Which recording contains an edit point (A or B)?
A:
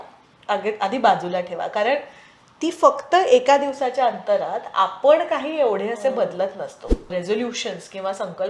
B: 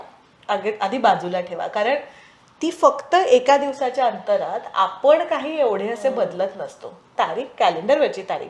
A